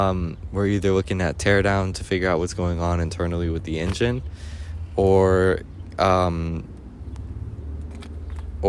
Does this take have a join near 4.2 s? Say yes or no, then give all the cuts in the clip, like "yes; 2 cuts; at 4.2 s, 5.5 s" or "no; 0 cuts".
no; 0 cuts